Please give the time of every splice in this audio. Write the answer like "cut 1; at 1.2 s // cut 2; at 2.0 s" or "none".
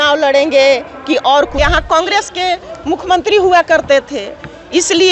cut 1; at 1.5 s